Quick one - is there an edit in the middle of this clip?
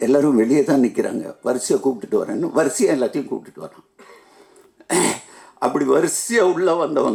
no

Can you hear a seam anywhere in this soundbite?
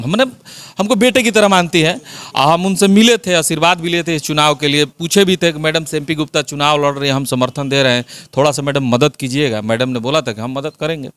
no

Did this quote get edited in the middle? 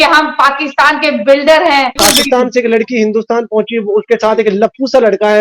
yes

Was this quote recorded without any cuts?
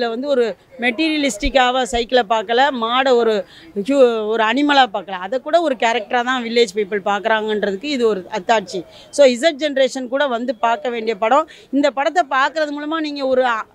yes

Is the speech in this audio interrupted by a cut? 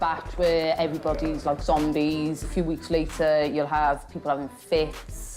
yes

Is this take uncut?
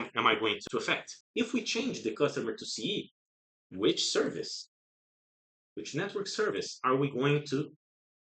no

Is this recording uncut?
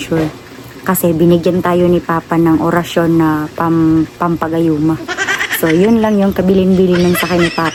yes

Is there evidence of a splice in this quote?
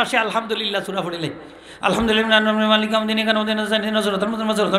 no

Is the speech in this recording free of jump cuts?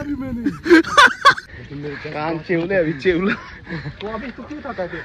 no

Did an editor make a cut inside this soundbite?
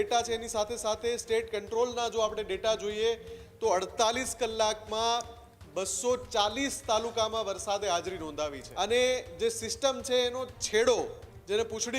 yes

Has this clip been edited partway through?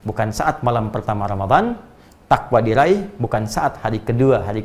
no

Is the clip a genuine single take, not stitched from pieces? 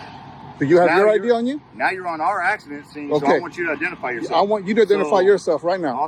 yes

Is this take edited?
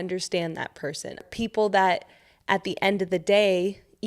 yes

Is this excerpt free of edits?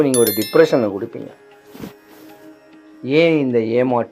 yes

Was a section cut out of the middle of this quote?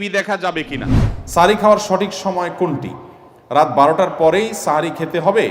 yes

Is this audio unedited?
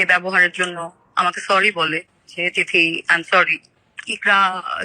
no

